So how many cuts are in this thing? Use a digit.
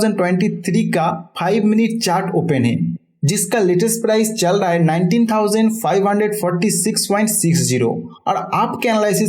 0